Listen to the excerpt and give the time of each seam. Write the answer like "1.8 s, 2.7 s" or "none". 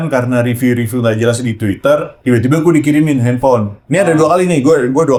none